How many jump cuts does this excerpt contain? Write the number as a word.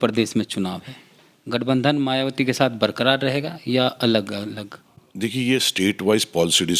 zero